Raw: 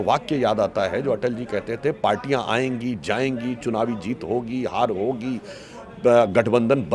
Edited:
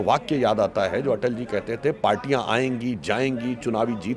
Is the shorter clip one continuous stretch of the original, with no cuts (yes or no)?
yes